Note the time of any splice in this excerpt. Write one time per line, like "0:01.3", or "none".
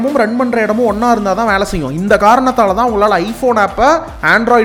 none